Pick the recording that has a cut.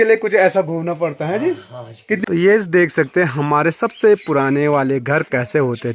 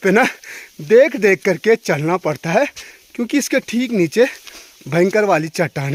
first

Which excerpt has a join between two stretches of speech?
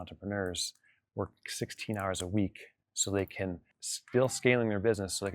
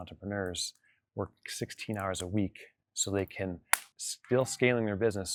first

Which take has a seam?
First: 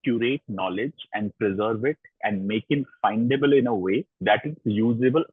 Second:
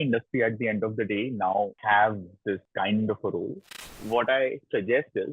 second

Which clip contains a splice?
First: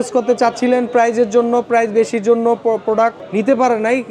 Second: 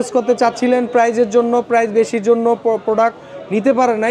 first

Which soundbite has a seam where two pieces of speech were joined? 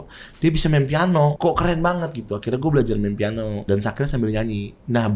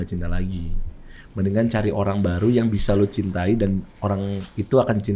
first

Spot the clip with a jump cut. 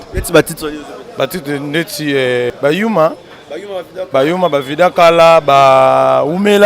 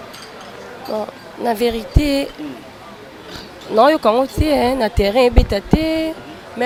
first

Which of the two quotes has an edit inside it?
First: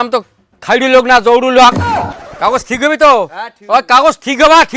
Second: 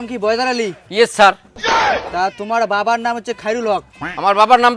first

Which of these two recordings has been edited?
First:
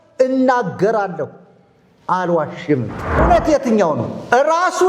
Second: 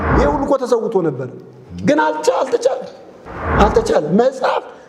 first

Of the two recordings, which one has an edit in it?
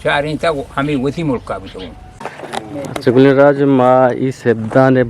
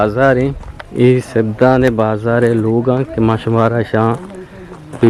first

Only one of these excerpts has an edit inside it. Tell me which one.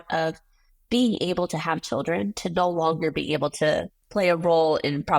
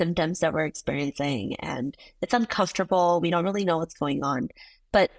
first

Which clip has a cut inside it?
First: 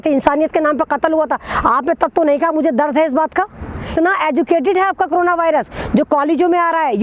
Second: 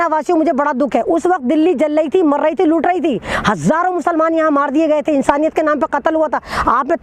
first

